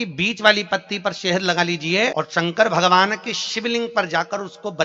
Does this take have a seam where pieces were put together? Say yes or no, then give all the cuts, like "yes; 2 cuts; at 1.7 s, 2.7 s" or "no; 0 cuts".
yes; 1 cut; at 2.1 s